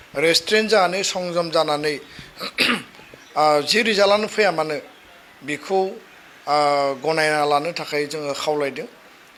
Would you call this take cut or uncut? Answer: uncut